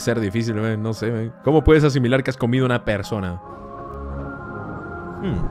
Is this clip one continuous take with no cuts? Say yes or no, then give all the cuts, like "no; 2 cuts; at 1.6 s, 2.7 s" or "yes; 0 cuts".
no; 1 cut; at 3.5 s